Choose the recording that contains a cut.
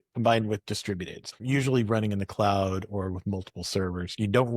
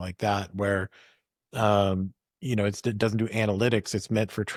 first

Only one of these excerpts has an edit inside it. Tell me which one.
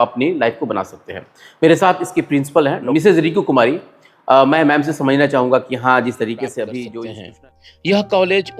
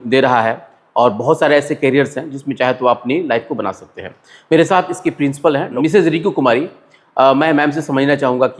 first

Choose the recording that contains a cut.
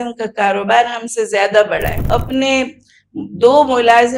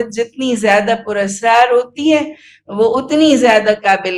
first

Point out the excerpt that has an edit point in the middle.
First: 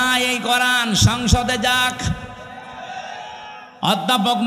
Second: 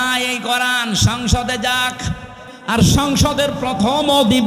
second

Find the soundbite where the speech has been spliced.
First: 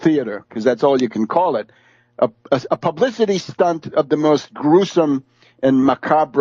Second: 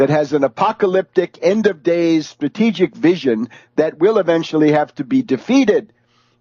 first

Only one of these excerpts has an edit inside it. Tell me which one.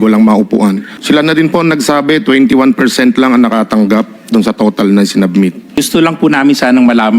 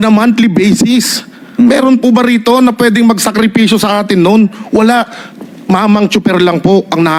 first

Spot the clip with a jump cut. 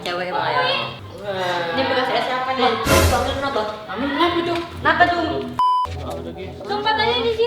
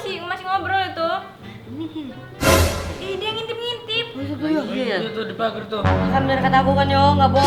first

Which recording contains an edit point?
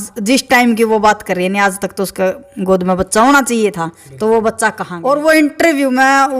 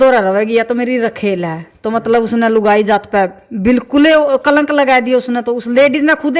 first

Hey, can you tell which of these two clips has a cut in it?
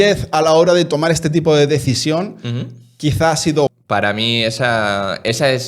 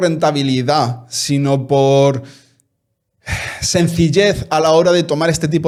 first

